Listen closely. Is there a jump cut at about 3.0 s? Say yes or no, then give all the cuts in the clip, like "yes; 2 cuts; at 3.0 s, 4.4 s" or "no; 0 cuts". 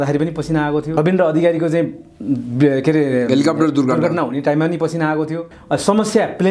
no; 2 cuts; at 1.0 s, 5.5 s